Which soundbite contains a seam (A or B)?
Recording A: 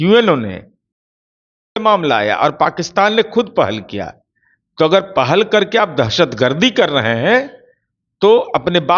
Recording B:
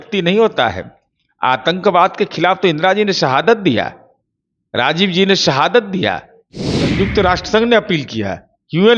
B